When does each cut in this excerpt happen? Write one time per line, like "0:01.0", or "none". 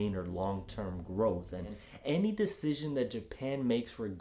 0:01.9